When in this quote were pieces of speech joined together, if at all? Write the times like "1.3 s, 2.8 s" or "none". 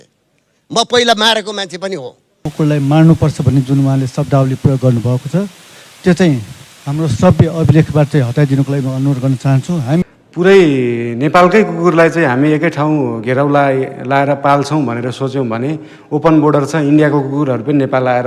2.4 s, 10.0 s